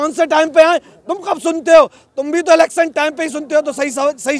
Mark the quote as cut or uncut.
uncut